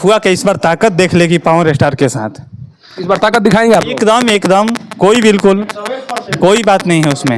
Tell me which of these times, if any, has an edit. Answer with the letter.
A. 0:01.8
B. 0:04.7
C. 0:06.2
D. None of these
D